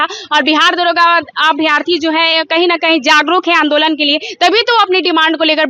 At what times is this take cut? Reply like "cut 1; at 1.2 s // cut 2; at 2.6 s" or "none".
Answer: none

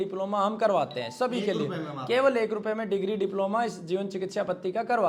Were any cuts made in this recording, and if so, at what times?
none

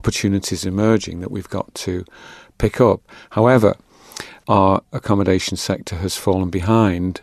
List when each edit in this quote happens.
cut 1; at 4.3 s

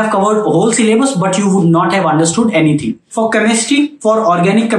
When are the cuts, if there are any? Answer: cut 1; at 3.0 s

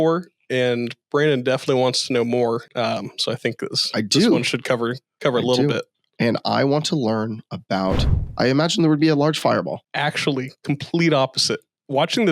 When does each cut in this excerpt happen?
cut 1; at 8.1 s

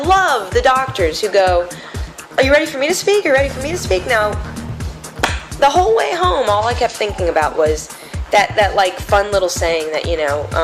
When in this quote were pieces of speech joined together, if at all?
none

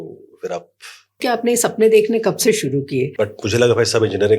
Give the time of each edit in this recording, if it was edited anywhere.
cut 1; at 1.2 s // cut 2; at 3.1 s

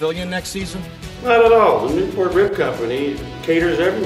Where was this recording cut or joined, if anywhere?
none

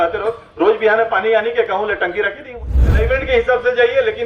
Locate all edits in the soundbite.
cut 1; at 3.0 s

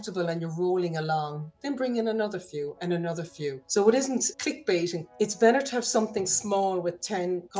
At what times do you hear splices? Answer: cut 1; at 5.0 s

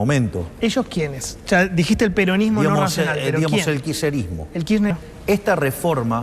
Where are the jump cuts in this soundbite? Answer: cut 1; at 4.9 s

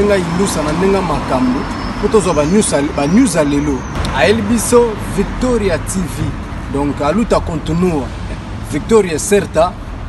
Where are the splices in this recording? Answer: none

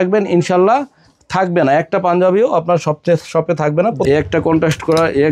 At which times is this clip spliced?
cut 1; at 4.1 s

